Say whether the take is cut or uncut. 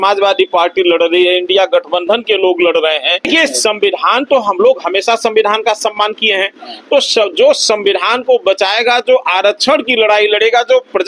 cut